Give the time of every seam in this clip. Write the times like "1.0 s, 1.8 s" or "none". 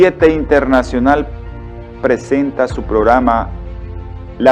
2.3 s